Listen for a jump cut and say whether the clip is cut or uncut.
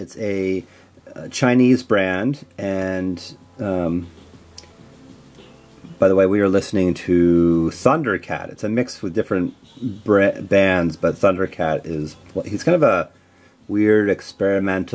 cut